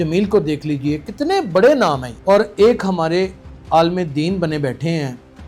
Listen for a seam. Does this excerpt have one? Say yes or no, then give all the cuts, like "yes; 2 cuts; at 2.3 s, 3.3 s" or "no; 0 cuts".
no; 0 cuts